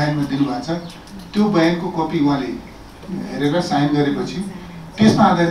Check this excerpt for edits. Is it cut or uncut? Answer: uncut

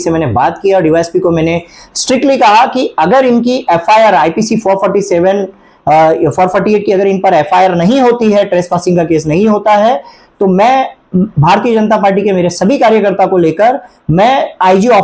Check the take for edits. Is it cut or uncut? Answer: uncut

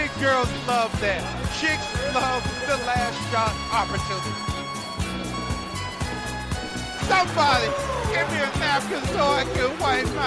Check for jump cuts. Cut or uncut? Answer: uncut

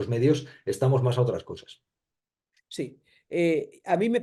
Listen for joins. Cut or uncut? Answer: uncut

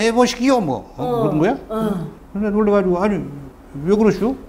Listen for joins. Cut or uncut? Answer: cut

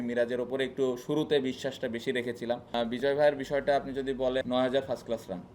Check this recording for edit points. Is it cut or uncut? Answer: cut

